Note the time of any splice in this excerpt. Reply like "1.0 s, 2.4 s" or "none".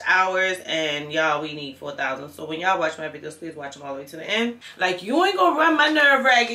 4.7 s